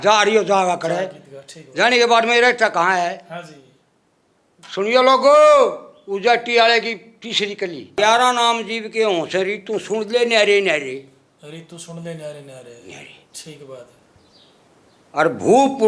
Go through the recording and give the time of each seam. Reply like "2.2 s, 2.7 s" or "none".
8.0 s